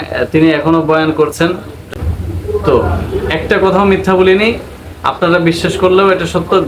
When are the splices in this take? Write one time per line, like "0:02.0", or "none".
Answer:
0:01.7